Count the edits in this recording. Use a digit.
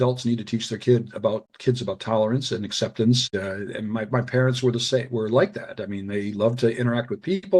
1